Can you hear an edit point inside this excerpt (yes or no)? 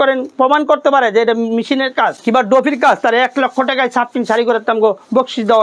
yes